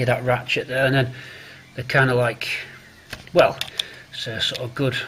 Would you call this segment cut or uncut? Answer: uncut